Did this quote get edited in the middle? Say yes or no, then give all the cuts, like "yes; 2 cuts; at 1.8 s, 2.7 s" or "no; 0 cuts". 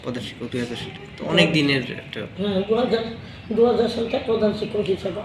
no; 0 cuts